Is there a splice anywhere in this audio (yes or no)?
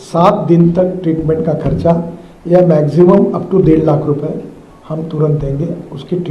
no